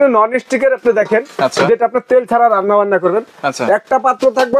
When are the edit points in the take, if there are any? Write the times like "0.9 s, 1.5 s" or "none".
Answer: none